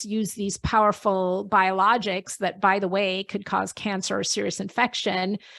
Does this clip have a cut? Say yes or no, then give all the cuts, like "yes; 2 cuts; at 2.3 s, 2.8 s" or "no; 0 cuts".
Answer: no; 0 cuts